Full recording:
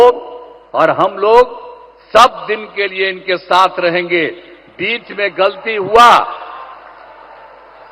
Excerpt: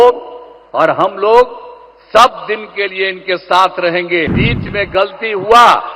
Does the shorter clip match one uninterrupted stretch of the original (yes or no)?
no